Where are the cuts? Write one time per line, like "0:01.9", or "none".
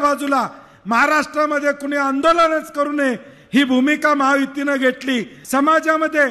0:05.4